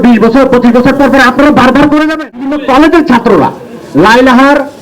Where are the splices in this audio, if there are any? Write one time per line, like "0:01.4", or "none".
0:02.6